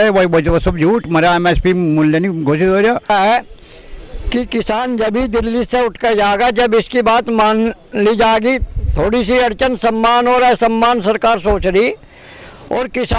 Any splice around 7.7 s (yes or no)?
no